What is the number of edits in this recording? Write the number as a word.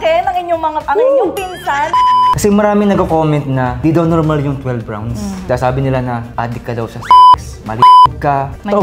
four